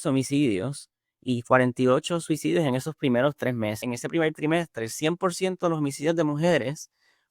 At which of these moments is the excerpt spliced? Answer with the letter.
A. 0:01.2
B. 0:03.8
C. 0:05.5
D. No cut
B